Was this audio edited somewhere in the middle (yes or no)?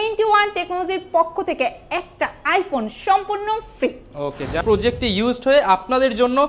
yes